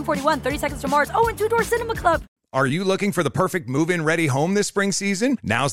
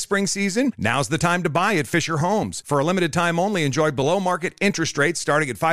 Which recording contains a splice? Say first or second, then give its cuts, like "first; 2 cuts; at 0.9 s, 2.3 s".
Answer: first; 1 cut; at 2.4 s